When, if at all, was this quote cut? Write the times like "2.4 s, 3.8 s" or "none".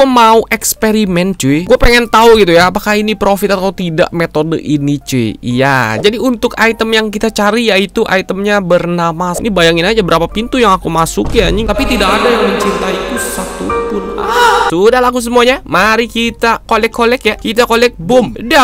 6.0 s, 9.4 s, 14.7 s